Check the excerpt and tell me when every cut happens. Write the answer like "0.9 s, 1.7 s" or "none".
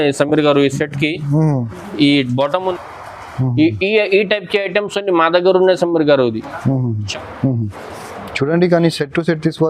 2.7 s, 7.1 s